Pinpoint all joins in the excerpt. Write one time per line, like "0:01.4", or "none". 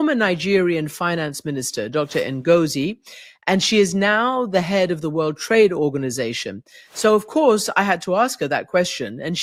none

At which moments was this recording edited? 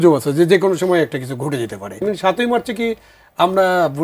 0:02.0

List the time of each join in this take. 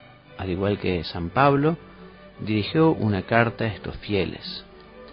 none

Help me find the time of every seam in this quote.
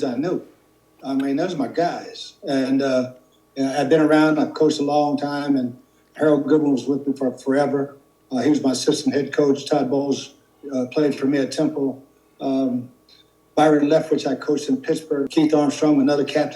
0:15.3

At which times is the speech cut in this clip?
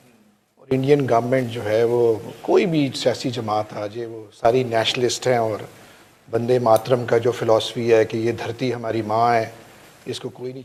none

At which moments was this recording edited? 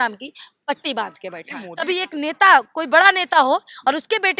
0:01.6

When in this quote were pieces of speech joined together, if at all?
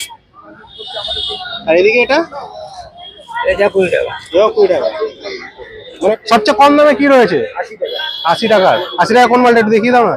0:06.2

